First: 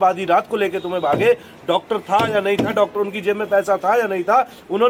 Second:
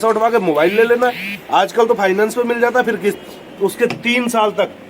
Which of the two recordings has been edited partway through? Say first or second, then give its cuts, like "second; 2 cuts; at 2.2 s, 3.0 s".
second; 1 cut; at 3.2 s